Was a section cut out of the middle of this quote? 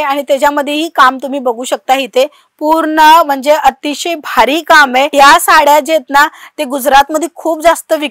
no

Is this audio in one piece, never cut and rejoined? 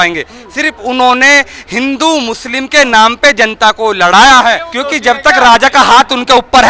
no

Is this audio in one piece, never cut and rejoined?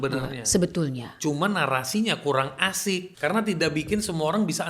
no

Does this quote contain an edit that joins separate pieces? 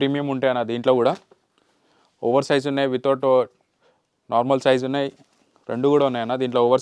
no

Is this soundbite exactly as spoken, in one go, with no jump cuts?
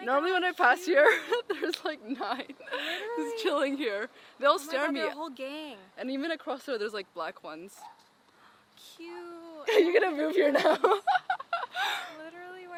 yes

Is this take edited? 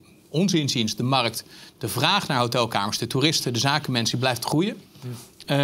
no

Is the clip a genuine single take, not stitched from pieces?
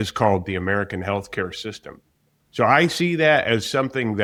yes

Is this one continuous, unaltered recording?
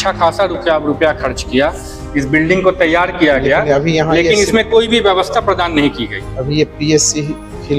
yes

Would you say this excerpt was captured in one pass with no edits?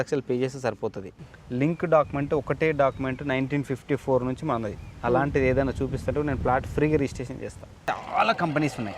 no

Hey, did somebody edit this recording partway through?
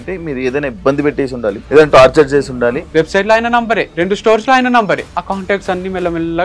yes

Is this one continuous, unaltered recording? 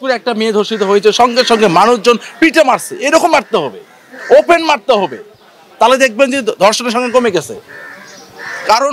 yes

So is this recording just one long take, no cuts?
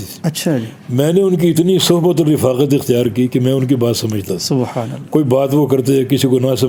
yes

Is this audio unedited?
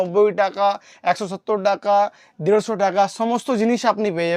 yes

